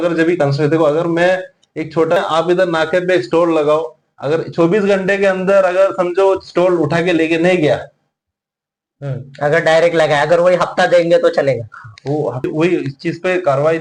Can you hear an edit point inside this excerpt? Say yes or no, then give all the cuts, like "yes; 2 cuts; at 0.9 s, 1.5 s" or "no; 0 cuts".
yes; 2 cuts; at 2.2 s, 12.5 s